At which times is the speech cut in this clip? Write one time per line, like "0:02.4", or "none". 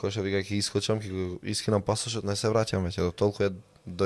none